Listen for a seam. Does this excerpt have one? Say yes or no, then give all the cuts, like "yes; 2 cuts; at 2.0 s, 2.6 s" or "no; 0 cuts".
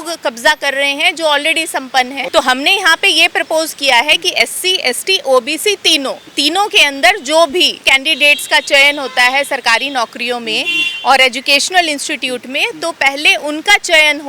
yes; 3 cuts; at 2.2 s, 6.2 s, 7.9 s